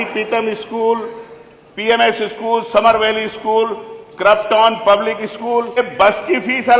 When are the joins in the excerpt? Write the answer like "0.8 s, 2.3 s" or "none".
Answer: 5.8 s